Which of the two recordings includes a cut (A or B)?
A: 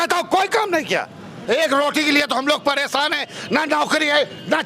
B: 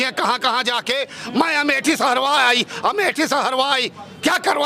A